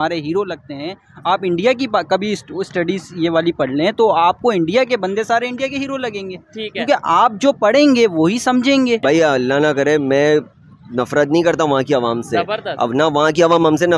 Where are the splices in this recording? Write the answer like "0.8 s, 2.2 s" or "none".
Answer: 9.0 s

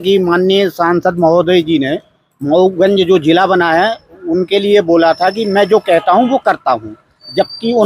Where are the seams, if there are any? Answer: none

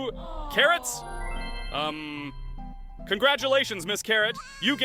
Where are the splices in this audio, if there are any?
none

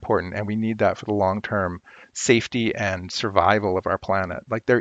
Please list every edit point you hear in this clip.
none

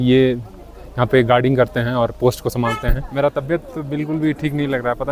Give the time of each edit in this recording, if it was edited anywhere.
3.0 s

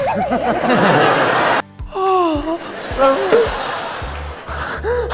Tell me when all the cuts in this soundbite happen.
1.6 s

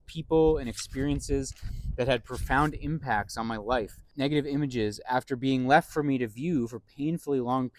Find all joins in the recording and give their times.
4.0 s

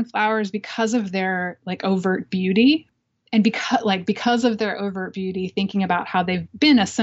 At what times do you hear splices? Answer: 2.9 s

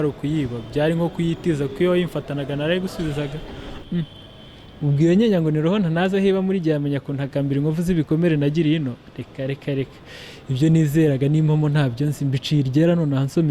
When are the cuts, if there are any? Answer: 3.7 s

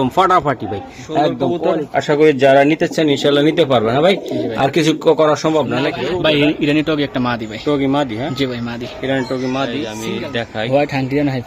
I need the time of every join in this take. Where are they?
1.6 s, 5.9 s, 10.0 s

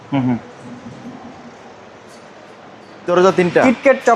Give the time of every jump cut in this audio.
3.0 s

